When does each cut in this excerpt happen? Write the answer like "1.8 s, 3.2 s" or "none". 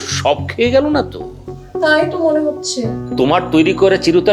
3.0 s